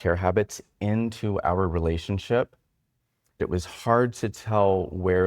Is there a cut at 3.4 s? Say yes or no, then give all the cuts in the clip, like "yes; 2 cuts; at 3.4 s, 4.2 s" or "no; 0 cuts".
yes; 1 cut; at 3.4 s